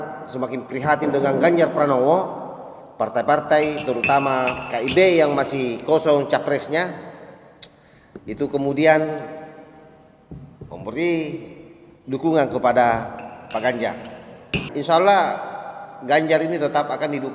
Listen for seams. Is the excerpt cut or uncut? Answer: cut